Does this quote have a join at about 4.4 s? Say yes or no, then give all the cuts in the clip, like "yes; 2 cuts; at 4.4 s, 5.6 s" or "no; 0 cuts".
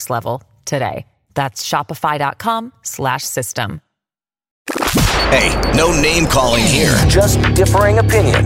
yes; 1 cut; at 4.4 s